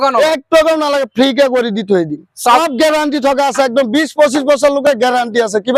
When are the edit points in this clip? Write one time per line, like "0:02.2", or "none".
0:02.6